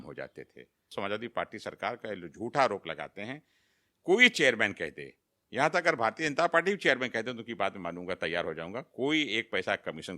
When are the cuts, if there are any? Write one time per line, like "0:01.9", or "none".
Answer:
0:00.9